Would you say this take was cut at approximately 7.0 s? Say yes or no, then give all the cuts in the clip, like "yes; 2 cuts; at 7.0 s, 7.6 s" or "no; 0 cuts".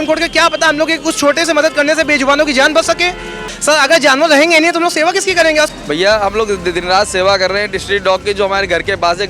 no; 2 cuts; at 3.5 s, 5.7 s